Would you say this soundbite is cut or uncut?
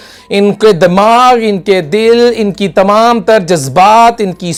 uncut